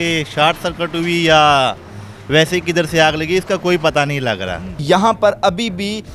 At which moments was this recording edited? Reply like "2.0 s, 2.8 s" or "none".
4.8 s